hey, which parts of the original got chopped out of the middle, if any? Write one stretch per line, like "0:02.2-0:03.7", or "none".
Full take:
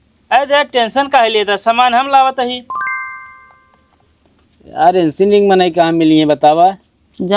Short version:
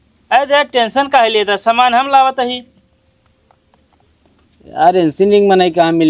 none